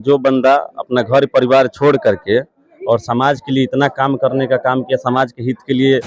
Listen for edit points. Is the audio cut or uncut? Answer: uncut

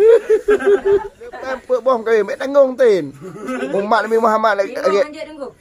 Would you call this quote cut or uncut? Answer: cut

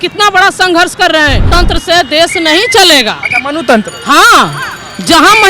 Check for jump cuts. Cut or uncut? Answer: cut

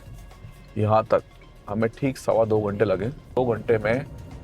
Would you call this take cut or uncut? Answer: cut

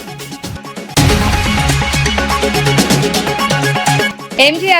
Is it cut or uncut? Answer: cut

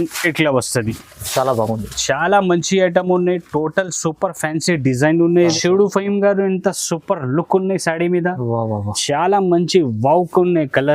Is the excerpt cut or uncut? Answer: cut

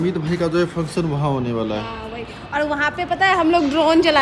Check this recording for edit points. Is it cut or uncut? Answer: uncut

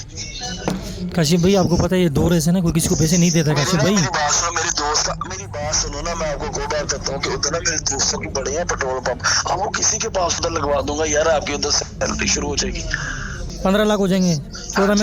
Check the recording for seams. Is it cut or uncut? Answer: uncut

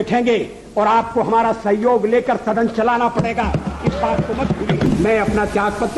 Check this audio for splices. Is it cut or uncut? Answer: cut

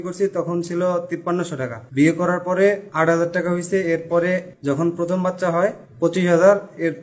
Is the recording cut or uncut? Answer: cut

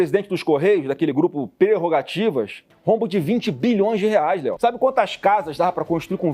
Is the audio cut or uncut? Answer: cut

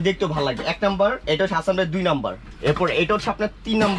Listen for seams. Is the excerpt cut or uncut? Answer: cut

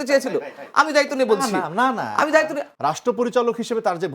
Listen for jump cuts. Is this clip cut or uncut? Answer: cut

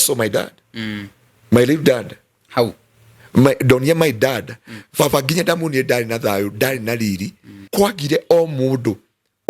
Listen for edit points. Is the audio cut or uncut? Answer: cut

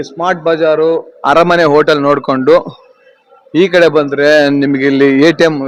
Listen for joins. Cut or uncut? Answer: uncut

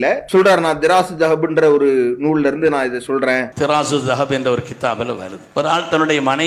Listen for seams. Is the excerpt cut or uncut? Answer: cut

